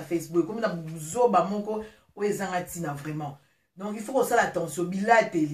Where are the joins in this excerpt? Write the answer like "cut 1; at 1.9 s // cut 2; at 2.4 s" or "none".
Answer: none